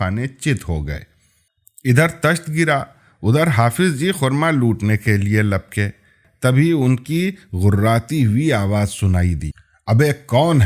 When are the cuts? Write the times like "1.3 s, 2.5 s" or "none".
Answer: 6.2 s